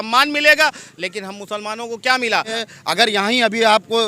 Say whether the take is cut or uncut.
cut